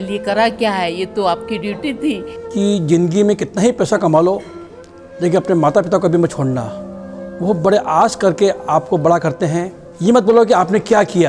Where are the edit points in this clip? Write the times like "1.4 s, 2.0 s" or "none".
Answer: 2.3 s, 9.8 s